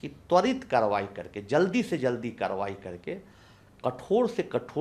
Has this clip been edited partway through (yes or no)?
no